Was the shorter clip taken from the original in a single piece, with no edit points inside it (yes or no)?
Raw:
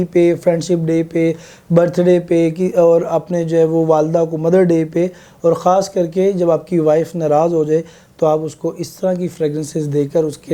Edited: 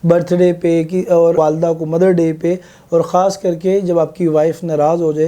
no